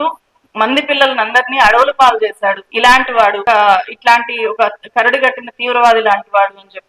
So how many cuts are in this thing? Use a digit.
2